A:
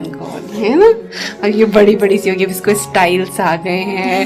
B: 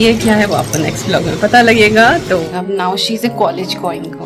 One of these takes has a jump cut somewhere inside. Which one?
B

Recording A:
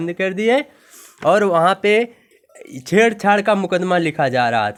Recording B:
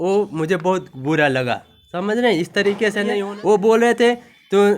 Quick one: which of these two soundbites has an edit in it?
B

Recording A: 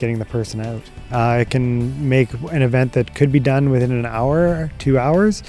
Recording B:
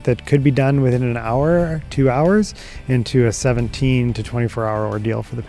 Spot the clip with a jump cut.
A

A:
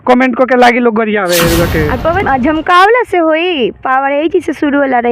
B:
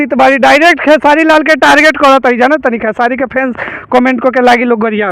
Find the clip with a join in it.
A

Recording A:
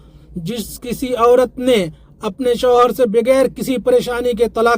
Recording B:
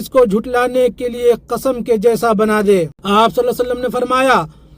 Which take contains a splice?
B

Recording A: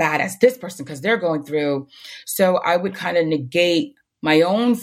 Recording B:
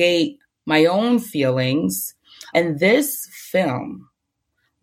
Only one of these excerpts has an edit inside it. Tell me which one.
B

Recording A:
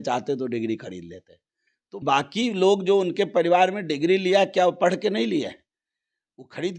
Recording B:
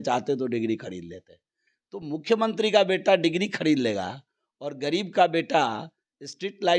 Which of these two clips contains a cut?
A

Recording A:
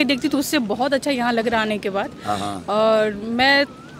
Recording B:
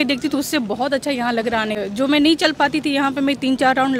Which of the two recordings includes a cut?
B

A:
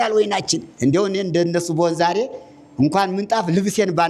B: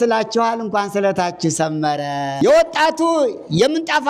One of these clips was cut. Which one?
B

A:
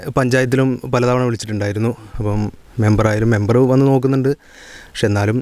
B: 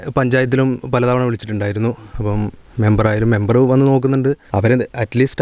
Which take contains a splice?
B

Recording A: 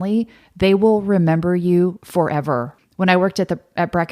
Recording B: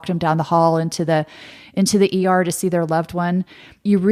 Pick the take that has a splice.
A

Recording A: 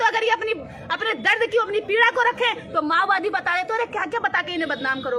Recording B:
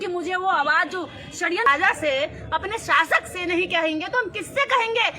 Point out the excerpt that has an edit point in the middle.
B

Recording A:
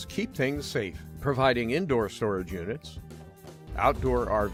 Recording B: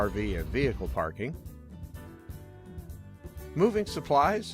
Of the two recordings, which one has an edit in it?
B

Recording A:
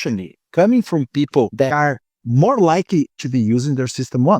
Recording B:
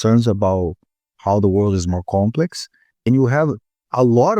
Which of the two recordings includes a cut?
A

